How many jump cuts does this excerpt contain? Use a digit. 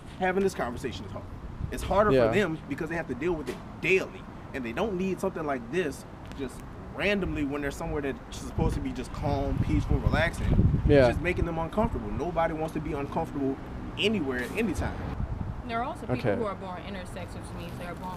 1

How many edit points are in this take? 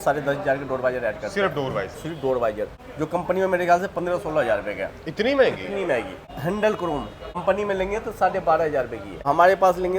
3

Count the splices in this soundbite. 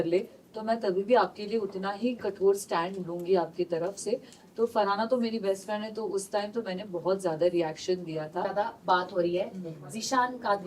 1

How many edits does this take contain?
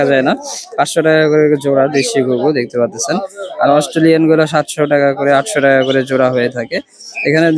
0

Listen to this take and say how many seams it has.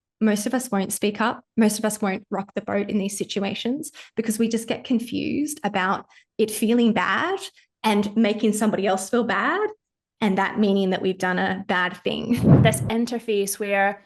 1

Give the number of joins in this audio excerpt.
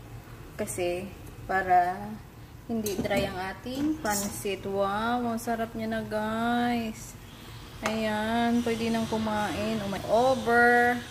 1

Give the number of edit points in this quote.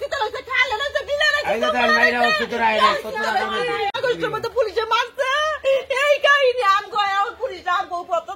0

